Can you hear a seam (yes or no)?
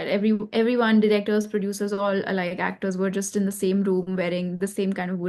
no